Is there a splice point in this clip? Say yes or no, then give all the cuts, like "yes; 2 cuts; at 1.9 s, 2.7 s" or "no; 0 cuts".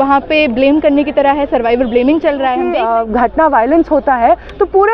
yes; 1 cut; at 2.7 s